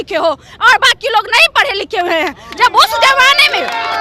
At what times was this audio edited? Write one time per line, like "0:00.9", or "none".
none